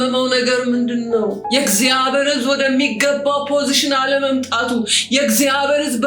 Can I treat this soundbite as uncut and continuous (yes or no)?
no